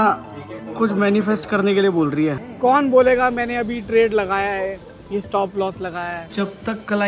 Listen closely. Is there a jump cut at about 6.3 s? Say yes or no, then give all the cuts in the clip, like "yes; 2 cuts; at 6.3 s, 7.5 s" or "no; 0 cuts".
yes; 2 cuts; at 2.5 s, 6.3 s